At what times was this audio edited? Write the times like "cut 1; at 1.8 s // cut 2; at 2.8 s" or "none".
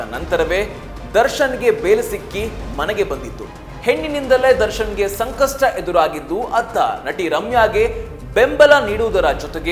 cut 1; at 3.6 s